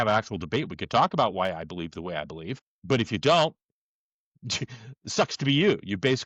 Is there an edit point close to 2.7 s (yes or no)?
yes